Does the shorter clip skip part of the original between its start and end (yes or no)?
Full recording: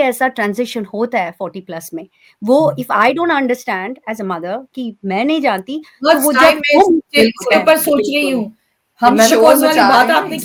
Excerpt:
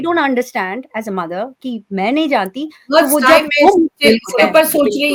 no